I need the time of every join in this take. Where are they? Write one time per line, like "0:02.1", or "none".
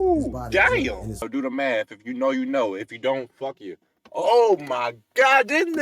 0:01.3

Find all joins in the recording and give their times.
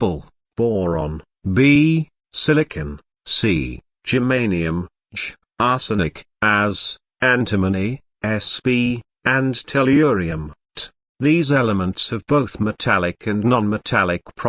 0:00.9
0:12.2

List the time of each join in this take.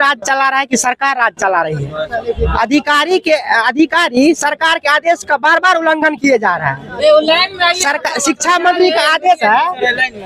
none

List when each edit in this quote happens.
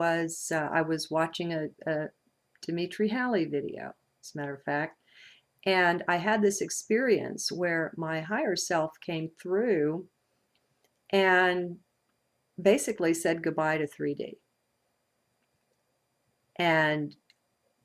none

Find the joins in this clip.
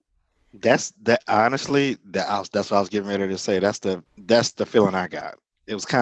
0:04.1

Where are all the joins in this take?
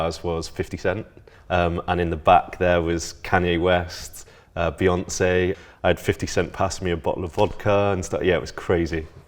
0:01.3
0:05.6

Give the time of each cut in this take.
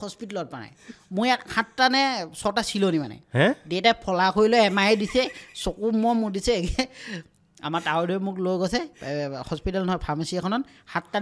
none

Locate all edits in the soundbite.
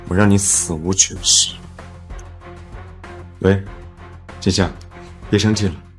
0:01.5
0:03.0

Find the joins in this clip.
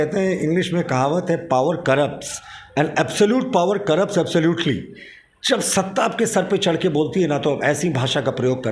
none

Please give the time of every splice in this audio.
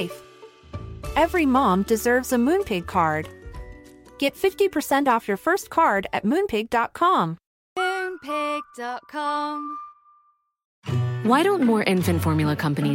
0:10.7

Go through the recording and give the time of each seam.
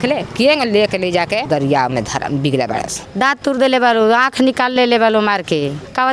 0:03.0

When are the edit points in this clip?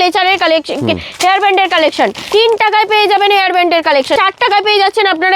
0:02.2
0:04.2

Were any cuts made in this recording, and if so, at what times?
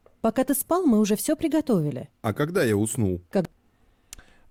none

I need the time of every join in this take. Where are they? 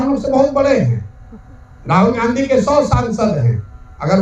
none

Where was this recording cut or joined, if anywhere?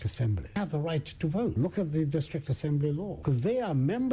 0:01.5
0:03.1

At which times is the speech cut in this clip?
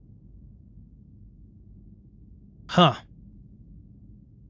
0:00.9

